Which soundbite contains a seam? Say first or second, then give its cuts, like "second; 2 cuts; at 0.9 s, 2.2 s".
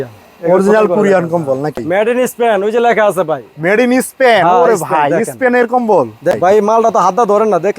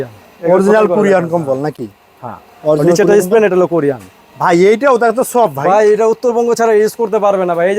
first; 2 cuts; at 1.8 s, 6.3 s